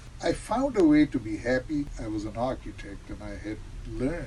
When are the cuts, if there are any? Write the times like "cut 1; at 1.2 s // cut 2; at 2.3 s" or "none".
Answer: cut 1; at 1.9 s